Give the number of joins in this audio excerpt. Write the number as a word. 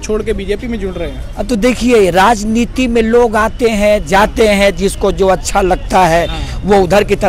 zero